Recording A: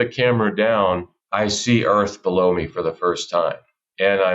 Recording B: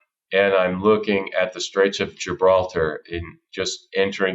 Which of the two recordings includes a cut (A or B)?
A